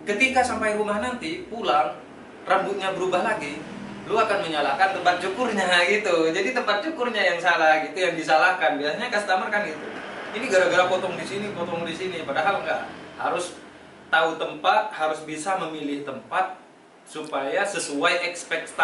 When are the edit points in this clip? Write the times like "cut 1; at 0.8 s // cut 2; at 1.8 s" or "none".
none

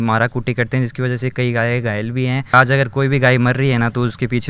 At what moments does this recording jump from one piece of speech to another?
cut 1; at 2.5 s

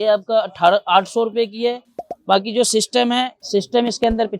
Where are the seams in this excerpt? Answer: none

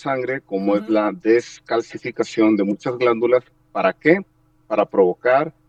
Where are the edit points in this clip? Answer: none

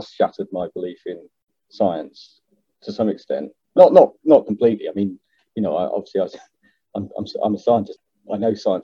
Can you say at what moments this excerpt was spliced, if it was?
cut 1; at 7.9 s

